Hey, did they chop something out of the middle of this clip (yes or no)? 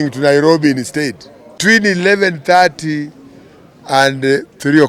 yes